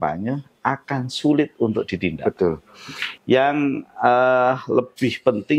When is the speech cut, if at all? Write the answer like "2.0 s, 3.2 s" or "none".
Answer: 3.0 s